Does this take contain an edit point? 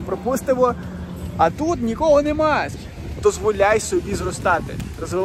yes; 1 cut; at 2.8 s

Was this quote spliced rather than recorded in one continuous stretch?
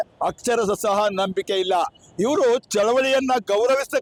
no; 0 cuts

